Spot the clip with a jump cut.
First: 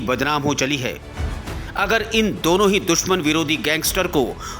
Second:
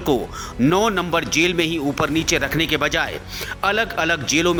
first; 1 cut; at 1.4 s

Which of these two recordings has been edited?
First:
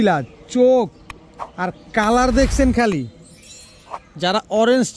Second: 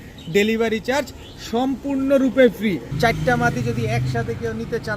second; 1 cut; at 2.9 s

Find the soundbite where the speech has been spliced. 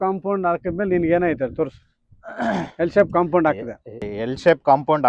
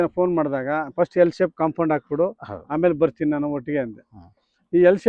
first; 1 cut; at 4.1 s

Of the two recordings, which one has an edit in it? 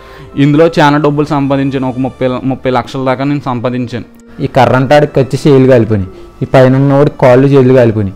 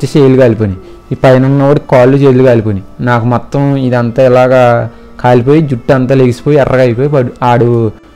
first; 1 cut; at 4.3 s

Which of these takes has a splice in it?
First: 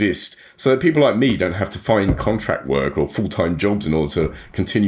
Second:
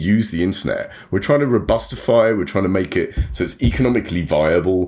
first; 1 cut; at 3.8 s

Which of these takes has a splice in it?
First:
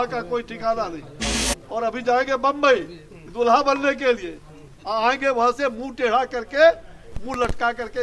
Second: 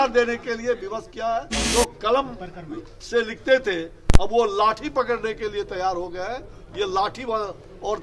second; 1 cut; at 1.6 s

